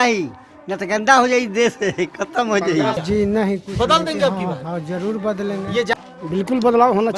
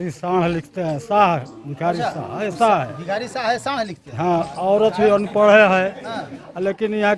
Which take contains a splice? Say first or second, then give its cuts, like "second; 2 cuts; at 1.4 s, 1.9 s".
first; 2 cuts; at 3.0 s, 5.9 s